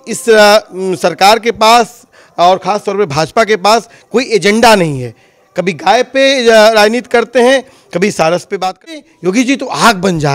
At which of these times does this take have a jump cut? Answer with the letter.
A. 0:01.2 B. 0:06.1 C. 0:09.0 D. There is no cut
C